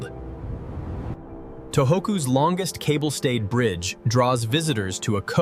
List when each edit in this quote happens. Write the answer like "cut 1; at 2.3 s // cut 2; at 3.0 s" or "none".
cut 1; at 1.2 s